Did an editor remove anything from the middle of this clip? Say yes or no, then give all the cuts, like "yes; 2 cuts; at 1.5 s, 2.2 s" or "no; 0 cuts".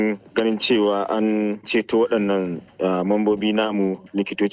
no; 0 cuts